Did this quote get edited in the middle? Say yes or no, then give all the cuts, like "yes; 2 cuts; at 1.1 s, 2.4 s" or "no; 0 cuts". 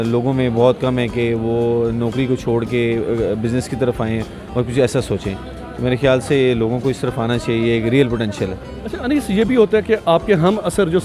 no; 0 cuts